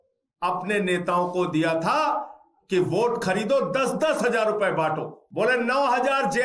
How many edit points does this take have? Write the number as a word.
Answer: one